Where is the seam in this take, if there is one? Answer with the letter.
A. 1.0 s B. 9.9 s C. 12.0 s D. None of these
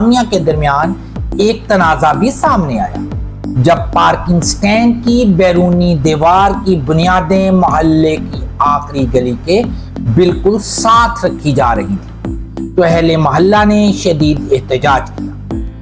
D